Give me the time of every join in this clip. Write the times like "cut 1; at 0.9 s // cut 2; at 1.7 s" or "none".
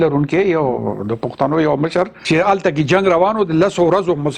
cut 1; at 2.2 s

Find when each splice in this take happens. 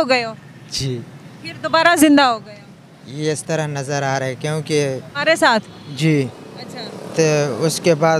cut 1; at 5.1 s

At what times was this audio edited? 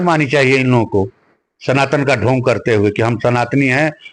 none

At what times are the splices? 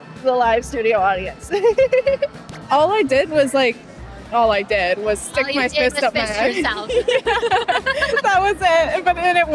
cut 1; at 2.5 s

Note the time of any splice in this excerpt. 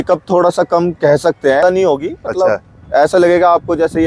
cut 1; at 1.6 s

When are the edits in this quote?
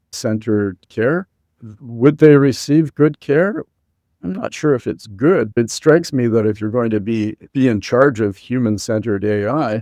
cut 1; at 5.5 s // cut 2; at 7.4 s

